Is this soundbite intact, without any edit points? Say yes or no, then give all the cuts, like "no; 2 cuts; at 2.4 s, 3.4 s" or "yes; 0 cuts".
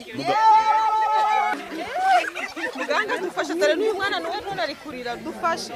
no; 1 cut; at 1.5 s